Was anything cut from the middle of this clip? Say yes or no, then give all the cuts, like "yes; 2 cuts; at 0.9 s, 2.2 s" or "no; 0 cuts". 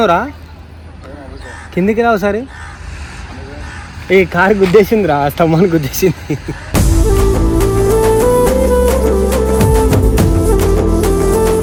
no; 0 cuts